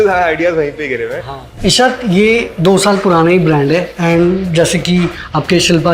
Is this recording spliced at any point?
yes; 1 cut; at 1.4 s

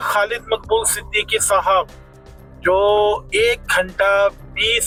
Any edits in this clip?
no; 0 cuts

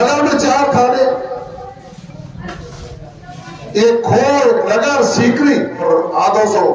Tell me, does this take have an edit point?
yes; 1 cut; at 5.8 s

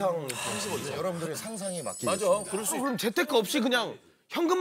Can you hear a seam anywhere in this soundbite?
yes; 2 cuts; at 0.9 s, 2.8 s

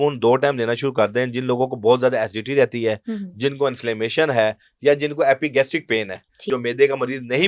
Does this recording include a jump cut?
yes; 1 cut; at 6.5 s

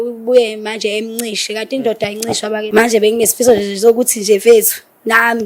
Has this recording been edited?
yes; 1 cut; at 2.7 s

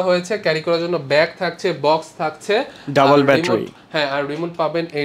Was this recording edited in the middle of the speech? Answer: no; 0 cuts

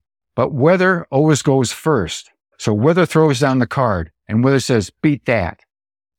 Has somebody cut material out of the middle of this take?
yes; 2 cuts; at 2.5 s, 4.1 s

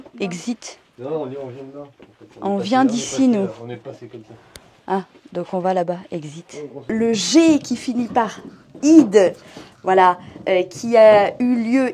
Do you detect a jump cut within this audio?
yes; 1 cut; at 6.9 s

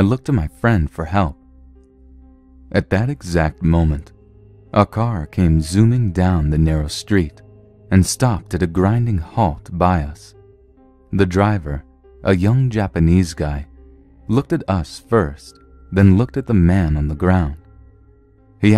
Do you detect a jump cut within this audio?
no; 0 cuts

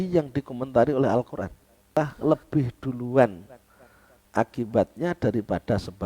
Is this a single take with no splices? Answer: no; 1 cut; at 2.0 s

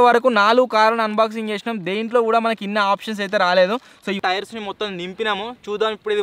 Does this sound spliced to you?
yes; 1 cut; at 4.2 s

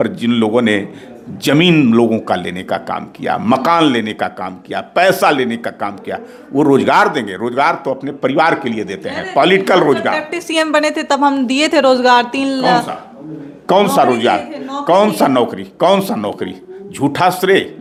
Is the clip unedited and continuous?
yes; 0 cuts

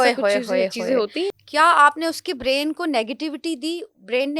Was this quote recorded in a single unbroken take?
no; 1 cut; at 1.4 s

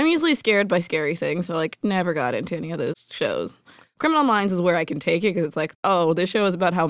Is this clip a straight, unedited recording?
no; 3 cuts; at 3.1 s, 3.9 s, 5.7 s

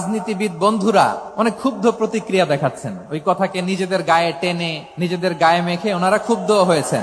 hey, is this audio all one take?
no; 2 cuts; at 1.2 s, 4.8 s

